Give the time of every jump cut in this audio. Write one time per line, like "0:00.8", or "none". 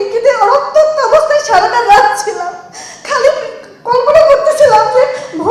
none